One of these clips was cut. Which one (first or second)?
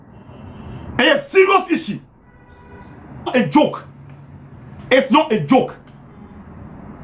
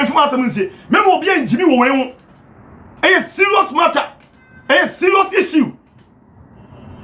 first